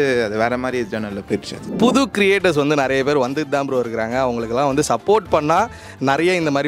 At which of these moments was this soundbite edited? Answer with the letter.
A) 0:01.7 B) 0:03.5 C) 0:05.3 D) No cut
A